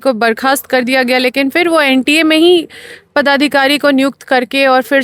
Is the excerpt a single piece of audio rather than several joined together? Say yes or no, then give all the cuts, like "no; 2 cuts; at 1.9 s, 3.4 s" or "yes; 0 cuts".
yes; 0 cuts